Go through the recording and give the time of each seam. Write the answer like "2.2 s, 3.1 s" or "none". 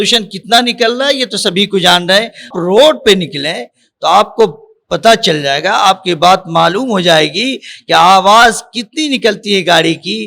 2.5 s